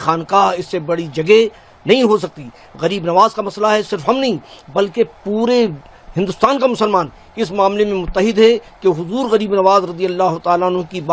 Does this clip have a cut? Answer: no; 0 cuts

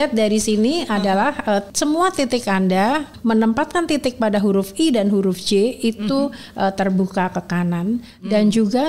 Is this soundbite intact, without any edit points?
no; 2 cuts; at 1.7 s, 3.1 s

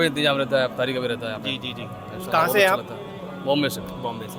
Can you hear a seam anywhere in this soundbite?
no; 0 cuts

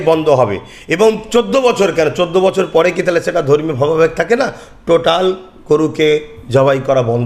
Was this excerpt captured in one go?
yes; 0 cuts

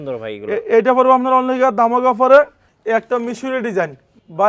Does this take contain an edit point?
yes; 1 cut; at 2.7 s

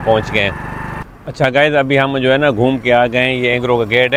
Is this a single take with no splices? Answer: yes; 0 cuts

